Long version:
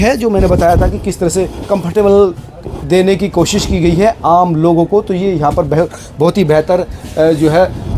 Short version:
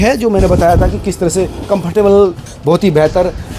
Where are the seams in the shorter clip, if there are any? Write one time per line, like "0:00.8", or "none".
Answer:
0:02.5

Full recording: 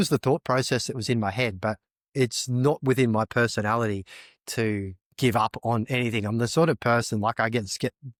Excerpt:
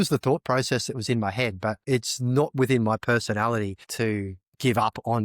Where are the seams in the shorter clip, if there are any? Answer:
0:01.8
0:03.8

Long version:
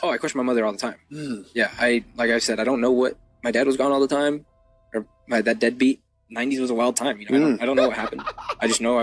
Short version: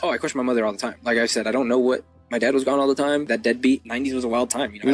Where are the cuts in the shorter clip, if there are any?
0:01.0
0:03.7

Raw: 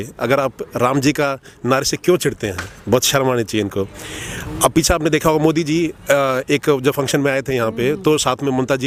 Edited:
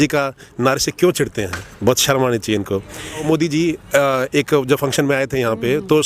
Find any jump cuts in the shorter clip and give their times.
0:03.2

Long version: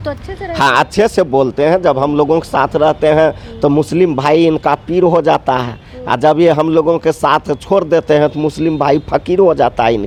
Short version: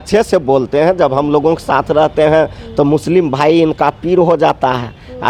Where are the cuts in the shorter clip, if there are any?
none

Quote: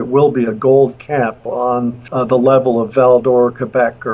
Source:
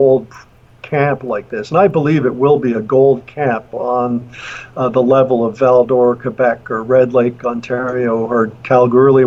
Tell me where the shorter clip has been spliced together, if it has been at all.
0:02.0

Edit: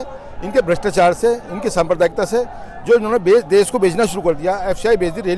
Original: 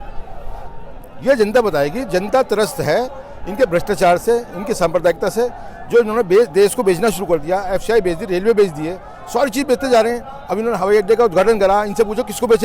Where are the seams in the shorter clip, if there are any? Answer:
none

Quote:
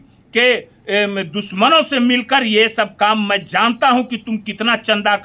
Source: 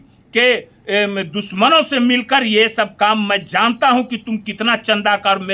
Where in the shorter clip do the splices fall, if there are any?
none

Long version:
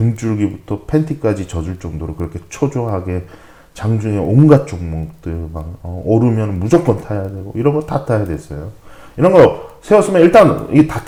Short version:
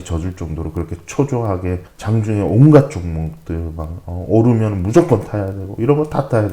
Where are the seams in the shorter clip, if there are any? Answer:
0:01.9

